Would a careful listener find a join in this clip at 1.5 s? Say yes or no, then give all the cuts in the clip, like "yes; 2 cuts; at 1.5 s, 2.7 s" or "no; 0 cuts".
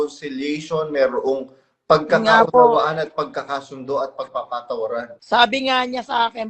no; 1 cut; at 5.2 s